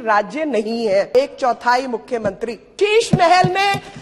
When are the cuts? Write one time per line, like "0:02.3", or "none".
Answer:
0:01.1
0:02.7

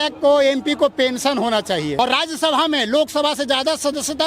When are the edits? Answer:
0:02.0

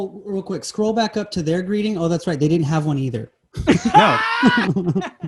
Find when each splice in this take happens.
none

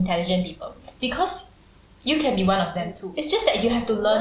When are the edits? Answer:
none

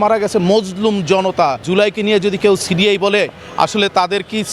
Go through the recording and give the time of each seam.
0:01.6

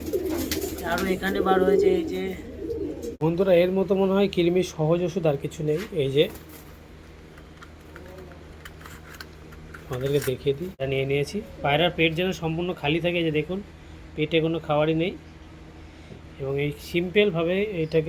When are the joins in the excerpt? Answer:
0:03.2
0:10.8

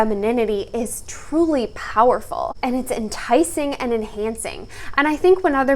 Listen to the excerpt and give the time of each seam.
none

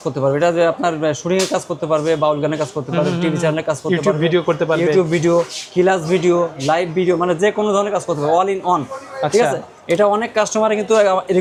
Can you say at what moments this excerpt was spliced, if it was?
none

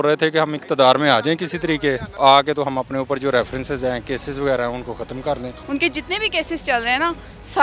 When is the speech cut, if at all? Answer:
0:02.1
0:05.5

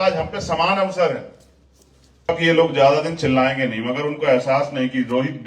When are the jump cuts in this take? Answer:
0:02.4

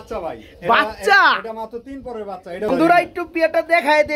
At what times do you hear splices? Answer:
0:02.7

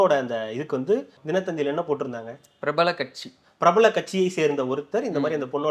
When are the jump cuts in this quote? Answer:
0:01.1

